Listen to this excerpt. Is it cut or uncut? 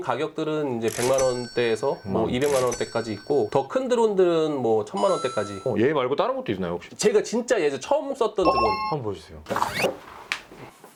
uncut